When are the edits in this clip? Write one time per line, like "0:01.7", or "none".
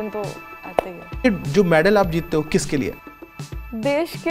0:01.2
0:03.0